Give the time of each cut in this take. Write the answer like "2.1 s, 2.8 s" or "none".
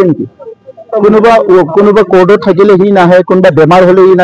none